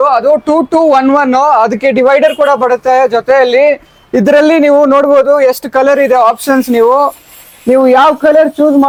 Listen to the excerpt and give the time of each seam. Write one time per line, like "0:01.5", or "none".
none